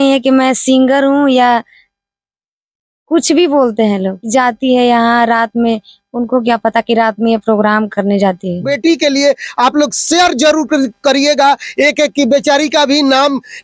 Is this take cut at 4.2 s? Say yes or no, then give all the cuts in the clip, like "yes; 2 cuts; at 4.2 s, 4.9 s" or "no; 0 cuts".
yes; 2 cuts; at 4.2 s, 8.7 s